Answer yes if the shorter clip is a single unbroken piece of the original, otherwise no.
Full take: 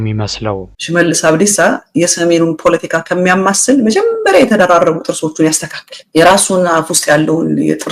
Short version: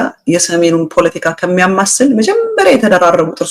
yes